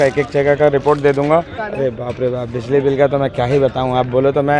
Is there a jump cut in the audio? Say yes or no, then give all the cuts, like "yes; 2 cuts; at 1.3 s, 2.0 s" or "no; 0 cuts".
yes; 1 cut; at 1.6 s